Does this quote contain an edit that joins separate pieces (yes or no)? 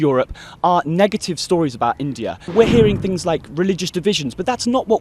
yes